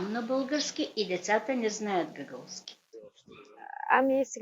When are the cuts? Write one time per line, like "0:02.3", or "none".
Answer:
0:03.1